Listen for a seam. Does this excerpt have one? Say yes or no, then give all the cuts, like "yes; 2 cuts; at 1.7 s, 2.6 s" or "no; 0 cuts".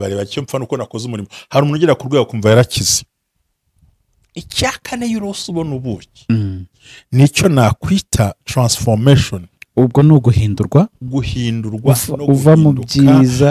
no; 0 cuts